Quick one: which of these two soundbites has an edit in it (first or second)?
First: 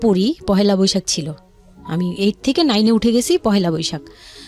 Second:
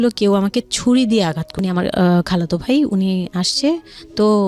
second